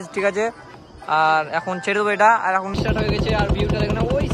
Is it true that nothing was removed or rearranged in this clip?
no; 1 cut; at 2.8 s

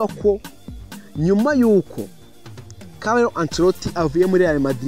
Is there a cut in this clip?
no; 0 cuts

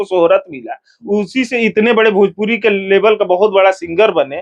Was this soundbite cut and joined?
no; 0 cuts

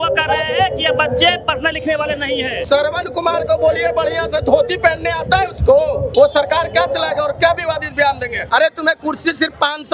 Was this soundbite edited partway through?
yes; 3 cuts; at 2.6 s, 6.1 s, 8.3 s

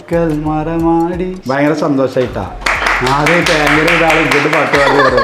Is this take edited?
yes; 1 cut; at 1.4 s

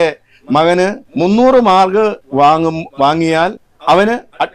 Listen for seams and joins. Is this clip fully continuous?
no; 3 cuts; at 1.0 s, 2.2 s, 3.7 s

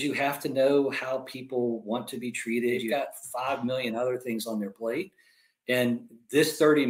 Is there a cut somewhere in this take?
yes; 1 cut; at 2.8 s

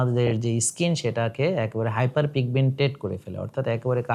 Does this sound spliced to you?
no; 0 cuts

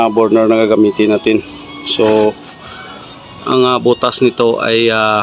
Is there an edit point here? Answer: no; 0 cuts

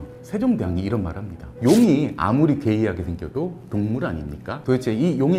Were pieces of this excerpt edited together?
no; 0 cuts

